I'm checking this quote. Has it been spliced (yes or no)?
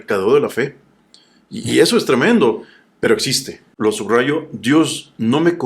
yes